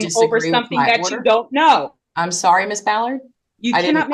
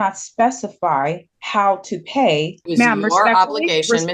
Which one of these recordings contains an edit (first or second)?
second